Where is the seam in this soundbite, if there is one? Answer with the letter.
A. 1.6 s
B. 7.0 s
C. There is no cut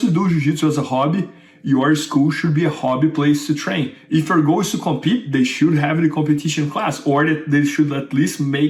C